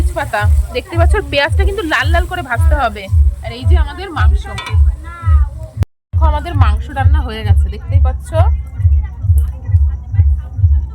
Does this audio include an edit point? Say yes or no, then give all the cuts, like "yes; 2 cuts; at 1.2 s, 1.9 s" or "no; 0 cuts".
yes; 1 cut; at 6.0 s